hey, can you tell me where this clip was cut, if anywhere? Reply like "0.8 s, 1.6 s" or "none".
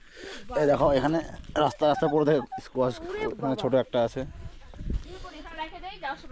none

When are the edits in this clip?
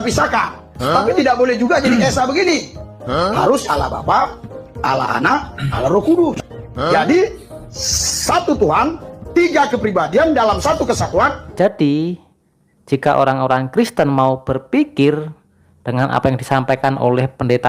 11.5 s

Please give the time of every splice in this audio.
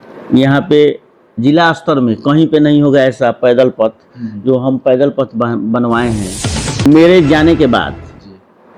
6.9 s

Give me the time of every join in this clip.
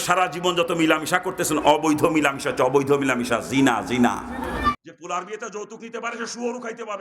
4.7 s

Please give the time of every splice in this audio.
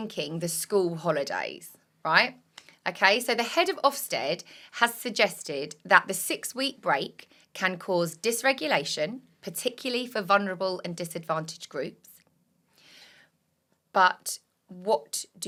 none

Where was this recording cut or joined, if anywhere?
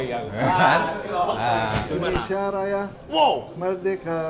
1.8 s

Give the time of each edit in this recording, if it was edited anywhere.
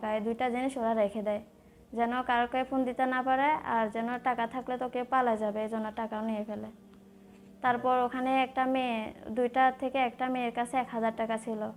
none

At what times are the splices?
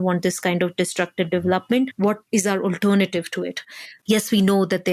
3.9 s

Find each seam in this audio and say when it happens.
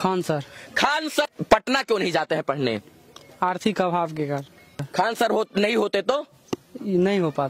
1.3 s, 4.7 s

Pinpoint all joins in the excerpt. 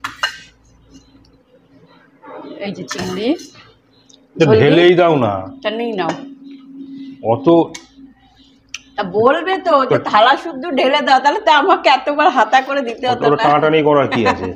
none

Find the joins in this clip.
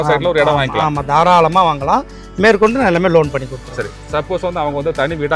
none

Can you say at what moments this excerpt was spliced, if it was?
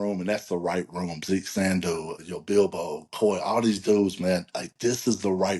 2.2 s

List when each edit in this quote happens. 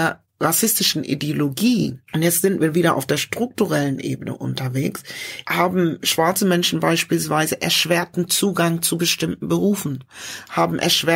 none

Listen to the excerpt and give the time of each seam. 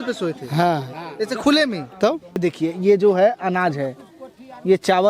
2.4 s

